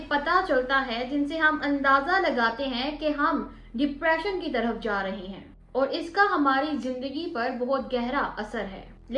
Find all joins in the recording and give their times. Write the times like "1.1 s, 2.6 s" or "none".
none